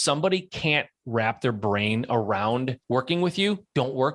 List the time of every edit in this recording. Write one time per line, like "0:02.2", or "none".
0:02.8